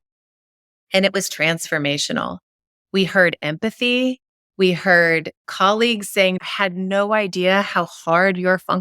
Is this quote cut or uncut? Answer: cut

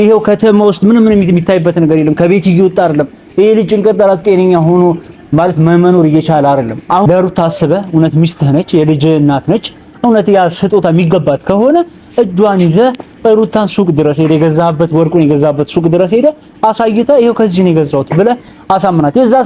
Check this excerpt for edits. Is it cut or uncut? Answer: cut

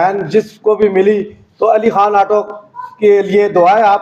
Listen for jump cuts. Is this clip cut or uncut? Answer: uncut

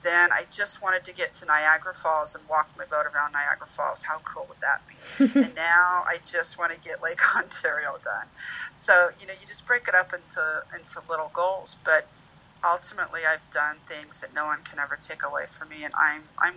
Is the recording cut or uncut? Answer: uncut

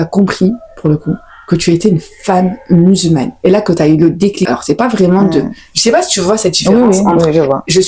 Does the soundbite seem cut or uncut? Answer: uncut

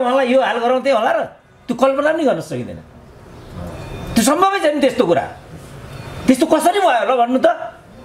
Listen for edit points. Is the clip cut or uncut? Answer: uncut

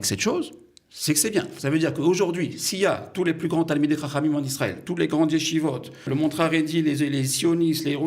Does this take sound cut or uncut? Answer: cut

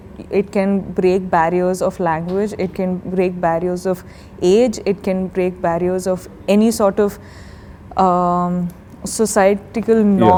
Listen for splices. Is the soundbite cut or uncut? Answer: uncut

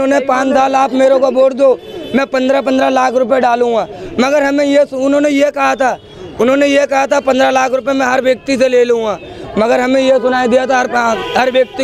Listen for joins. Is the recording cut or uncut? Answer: uncut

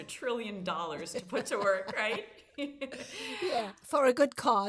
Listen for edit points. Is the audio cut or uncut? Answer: cut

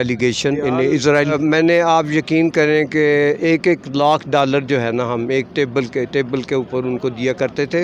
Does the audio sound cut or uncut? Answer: cut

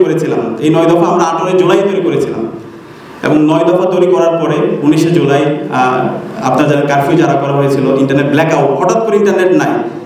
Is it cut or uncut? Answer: uncut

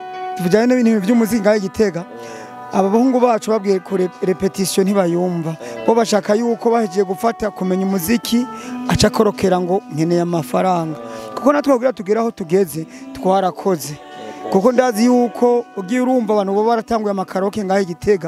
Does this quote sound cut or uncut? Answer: uncut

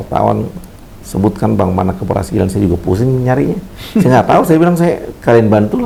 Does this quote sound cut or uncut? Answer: uncut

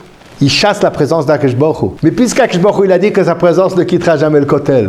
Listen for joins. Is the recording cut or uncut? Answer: cut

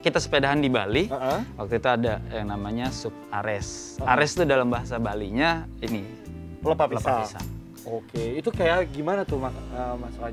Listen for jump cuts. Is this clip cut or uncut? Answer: uncut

